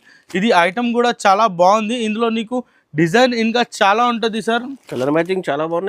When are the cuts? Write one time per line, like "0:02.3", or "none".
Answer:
none